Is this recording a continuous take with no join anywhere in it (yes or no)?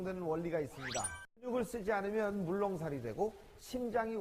no